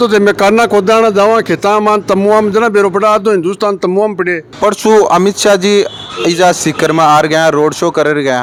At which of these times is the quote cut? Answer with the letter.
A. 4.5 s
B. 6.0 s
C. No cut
C